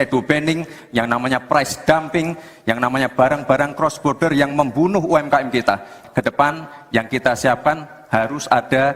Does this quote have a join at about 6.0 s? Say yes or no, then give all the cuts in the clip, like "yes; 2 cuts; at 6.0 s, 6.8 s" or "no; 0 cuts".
yes; 1 cut; at 6.0 s